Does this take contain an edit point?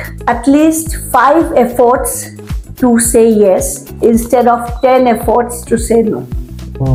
no; 0 cuts

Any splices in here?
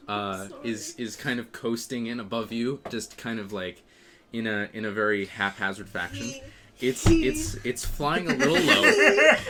no; 0 cuts

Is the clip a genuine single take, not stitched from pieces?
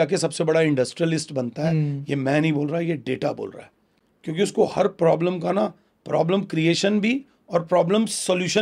yes; 0 cuts

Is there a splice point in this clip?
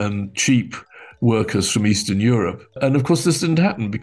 yes; 1 cut; at 2.8 s

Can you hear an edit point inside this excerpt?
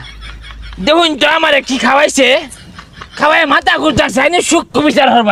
no; 0 cuts

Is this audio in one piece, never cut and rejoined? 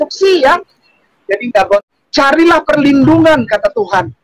no; 1 cut; at 1.8 s

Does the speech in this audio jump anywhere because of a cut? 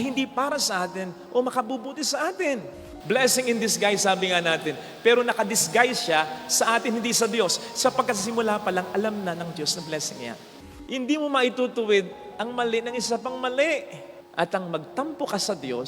yes; 2 cuts; at 2.7 s, 10.5 s

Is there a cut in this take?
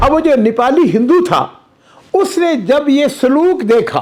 no; 0 cuts

